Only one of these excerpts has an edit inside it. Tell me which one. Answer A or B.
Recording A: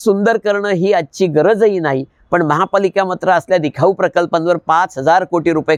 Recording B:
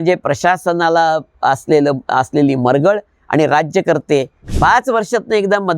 B